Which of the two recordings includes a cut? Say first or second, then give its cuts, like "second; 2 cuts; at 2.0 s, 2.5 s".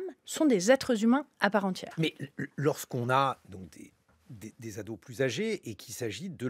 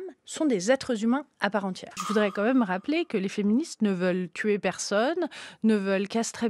second; 1 cut; at 1.9 s